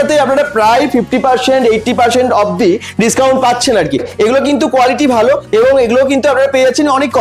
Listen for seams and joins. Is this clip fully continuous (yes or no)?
no